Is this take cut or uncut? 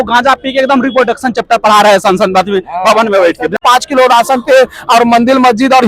cut